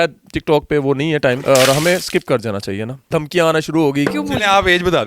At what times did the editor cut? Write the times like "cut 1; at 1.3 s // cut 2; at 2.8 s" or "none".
cut 1; at 1.4 s // cut 2; at 3.1 s // cut 3; at 4.1 s